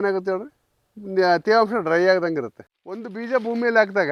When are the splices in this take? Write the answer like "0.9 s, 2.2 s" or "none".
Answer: 3.0 s